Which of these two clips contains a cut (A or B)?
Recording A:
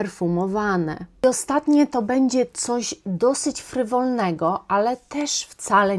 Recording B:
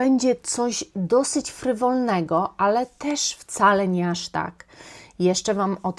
A